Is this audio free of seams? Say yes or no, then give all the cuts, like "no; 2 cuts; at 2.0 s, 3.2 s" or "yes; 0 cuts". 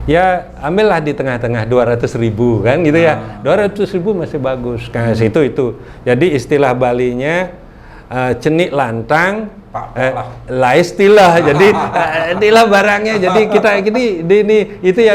yes; 0 cuts